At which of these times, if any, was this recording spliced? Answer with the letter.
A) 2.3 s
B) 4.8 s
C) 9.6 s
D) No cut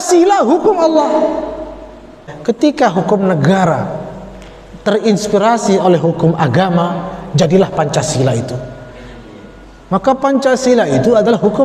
A